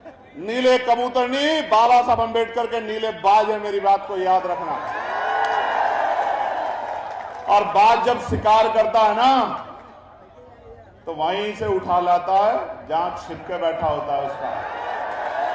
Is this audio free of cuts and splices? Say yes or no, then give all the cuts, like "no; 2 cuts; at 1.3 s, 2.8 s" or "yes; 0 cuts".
yes; 0 cuts